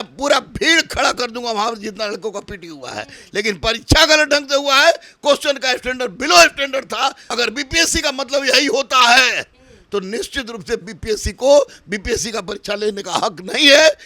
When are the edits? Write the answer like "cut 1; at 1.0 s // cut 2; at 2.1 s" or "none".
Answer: cut 1; at 7.2 s